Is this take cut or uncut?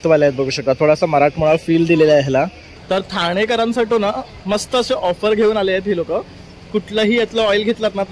cut